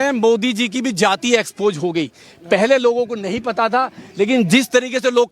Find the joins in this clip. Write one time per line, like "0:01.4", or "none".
none